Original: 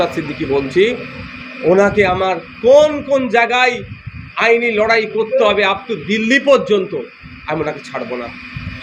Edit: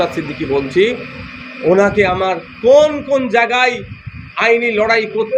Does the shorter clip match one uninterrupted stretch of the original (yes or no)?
yes